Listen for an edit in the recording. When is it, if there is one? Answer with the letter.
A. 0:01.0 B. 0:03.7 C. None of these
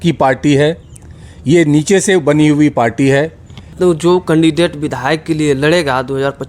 B